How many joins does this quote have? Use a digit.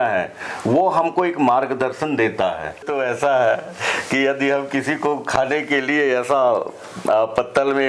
1